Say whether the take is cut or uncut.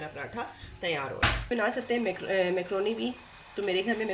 cut